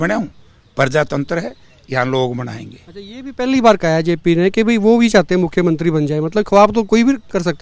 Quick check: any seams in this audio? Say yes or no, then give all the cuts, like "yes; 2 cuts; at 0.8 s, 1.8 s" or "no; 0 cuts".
no; 0 cuts